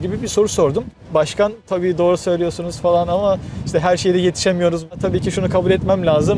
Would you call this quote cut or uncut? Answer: cut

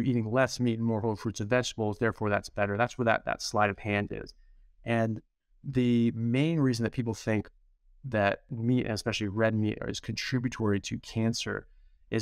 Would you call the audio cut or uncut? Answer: uncut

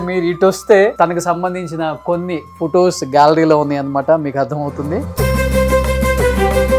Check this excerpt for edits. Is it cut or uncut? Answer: cut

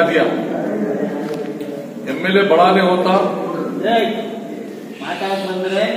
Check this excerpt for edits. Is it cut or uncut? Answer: uncut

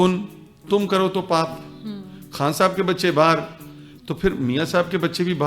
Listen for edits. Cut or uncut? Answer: uncut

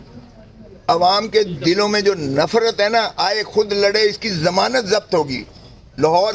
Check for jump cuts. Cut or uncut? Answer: uncut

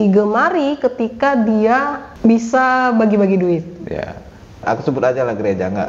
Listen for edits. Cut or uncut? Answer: cut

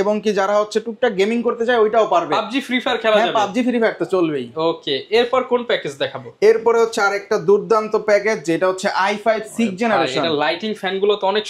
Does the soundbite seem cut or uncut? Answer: uncut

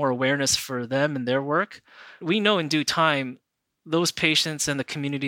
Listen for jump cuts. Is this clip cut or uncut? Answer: cut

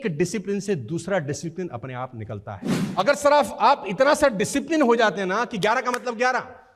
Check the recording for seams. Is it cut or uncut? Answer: cut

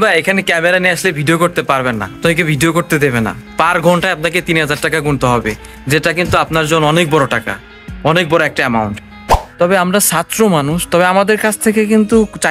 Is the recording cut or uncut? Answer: cut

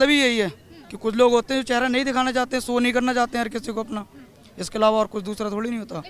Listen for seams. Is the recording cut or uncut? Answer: uncut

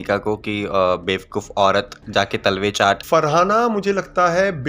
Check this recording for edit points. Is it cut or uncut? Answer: cut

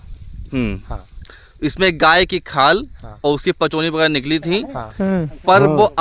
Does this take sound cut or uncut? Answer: uncut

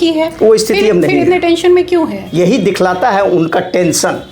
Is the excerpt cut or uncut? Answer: cut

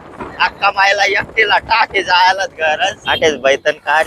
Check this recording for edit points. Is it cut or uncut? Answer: cut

